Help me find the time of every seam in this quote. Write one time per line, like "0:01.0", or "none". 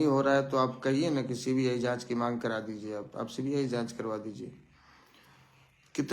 none